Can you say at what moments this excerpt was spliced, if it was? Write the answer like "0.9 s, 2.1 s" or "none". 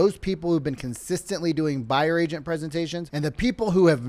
3.0 s